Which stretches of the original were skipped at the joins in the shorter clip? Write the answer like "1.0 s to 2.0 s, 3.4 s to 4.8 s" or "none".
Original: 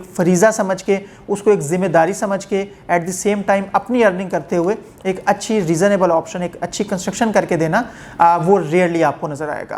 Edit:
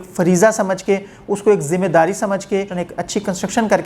2.7 s to 6.4 s